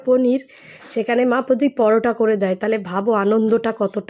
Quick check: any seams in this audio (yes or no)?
no